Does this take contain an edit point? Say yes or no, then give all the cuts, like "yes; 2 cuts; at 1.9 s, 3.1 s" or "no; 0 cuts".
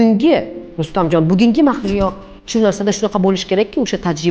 no; 0 cuts